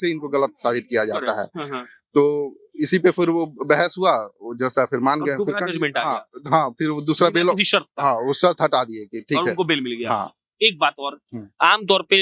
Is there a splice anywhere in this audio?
no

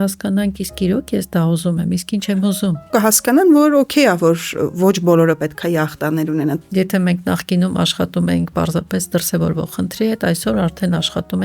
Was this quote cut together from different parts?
yes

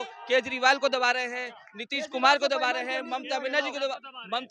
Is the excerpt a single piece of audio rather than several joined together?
yes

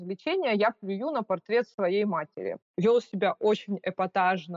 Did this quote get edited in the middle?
yes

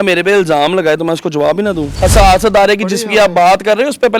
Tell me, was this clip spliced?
yes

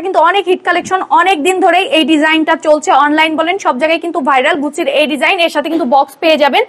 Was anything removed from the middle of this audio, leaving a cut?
no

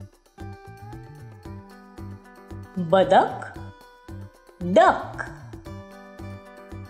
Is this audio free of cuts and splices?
yes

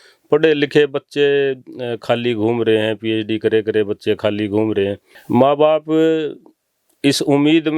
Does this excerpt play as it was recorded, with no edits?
no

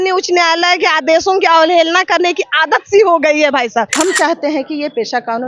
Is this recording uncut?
no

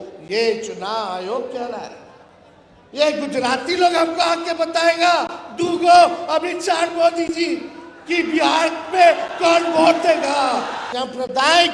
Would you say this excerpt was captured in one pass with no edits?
no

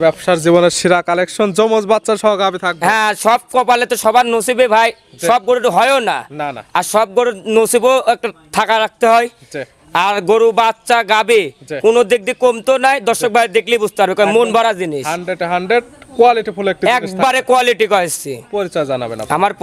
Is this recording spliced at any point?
no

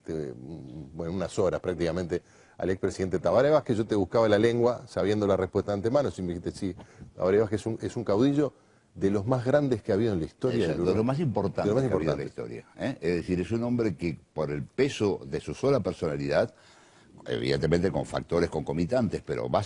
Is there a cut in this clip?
yes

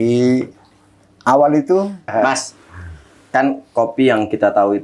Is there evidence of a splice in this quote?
yes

